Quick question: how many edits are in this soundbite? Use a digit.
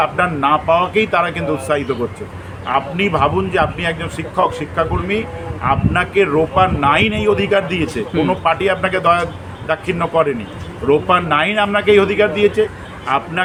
0